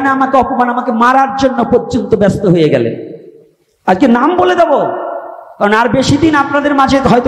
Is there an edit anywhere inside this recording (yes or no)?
no